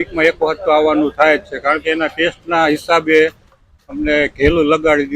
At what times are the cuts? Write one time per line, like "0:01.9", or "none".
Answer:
none